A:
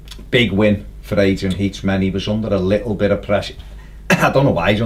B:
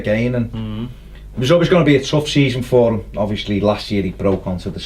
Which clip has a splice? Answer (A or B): B